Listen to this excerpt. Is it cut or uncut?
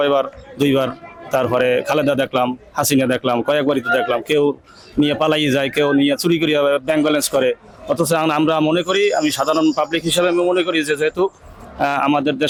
uncut